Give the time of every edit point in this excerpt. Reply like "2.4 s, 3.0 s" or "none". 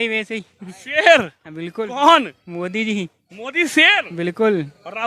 none